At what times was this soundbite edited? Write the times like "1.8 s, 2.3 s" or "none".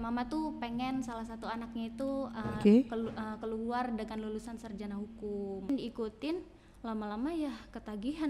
5.7 s